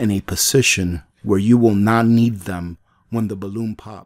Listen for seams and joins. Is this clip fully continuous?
yes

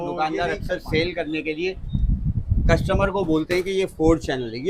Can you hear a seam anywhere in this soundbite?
no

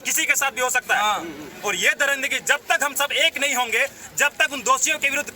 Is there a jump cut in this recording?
no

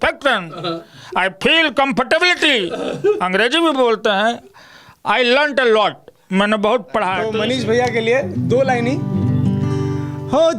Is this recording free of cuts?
no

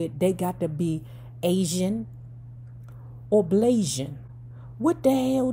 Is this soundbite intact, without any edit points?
yes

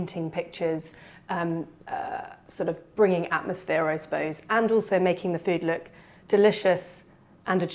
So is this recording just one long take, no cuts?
yes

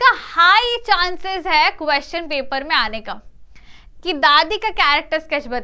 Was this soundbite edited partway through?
no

